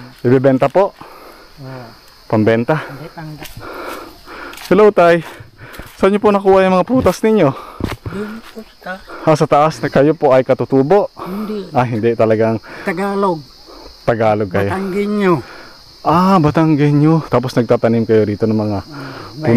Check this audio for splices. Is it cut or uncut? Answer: cut